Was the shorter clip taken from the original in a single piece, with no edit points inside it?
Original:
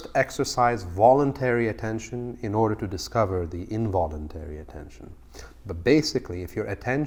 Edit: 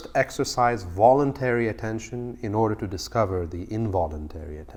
yes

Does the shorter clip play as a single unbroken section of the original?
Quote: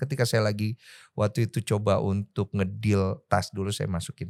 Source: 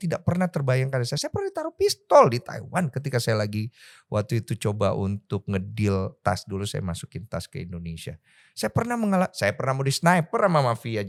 yes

